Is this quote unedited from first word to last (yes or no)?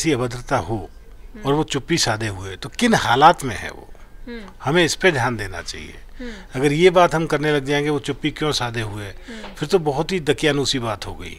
yes